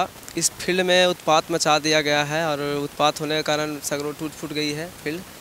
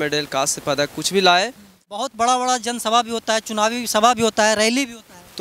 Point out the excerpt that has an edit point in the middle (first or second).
second